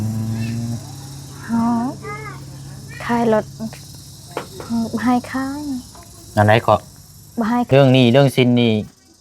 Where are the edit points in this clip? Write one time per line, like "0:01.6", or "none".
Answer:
0:07.7